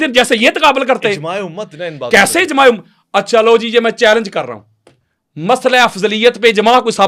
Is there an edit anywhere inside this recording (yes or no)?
no